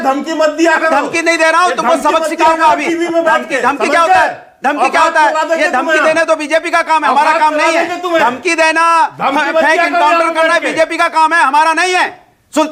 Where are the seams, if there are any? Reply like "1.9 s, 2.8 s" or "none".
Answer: none